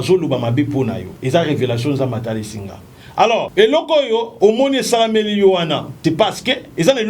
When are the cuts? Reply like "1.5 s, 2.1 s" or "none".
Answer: 1.1 s, 3.5 s, 4.3 s, 5.9 s